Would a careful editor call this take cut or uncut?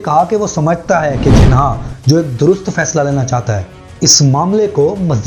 uncut